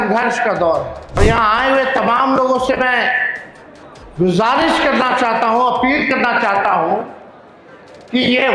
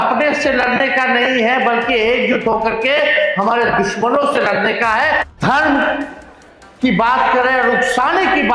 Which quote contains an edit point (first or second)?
first